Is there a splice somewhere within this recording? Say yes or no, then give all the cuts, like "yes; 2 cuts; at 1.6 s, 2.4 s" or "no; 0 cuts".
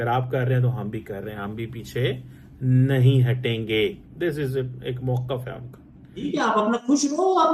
yes; 1 cut; at 6.2 s